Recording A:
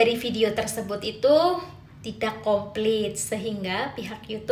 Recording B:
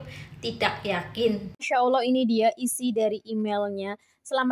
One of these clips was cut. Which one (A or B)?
B